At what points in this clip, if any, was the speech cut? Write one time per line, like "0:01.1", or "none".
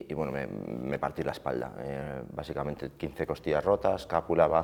none

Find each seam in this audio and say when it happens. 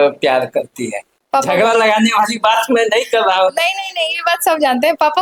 none

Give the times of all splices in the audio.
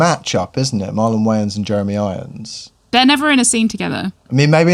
0:02.5

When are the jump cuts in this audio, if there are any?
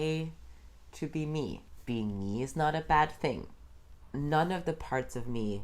0:01.7
0:04.0

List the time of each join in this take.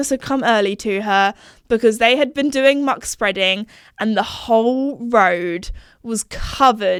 none

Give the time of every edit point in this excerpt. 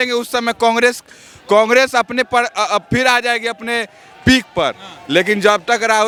none

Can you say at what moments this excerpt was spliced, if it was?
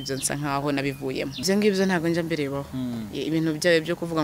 0:01.4

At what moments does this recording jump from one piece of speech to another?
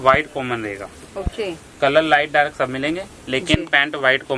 none

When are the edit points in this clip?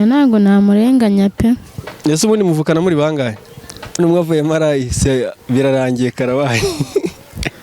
0:04.0

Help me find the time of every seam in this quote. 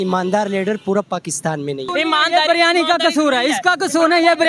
0:01.8

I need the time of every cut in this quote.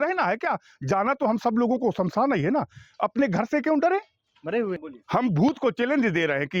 0:04.9

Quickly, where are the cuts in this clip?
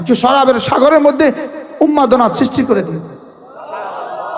none

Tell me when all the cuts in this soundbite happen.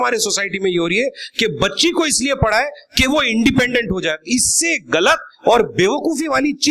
none

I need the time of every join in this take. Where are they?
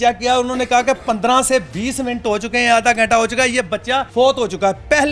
0:04.1

